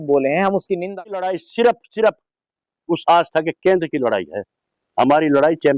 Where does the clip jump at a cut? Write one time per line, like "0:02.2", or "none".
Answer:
0:01.3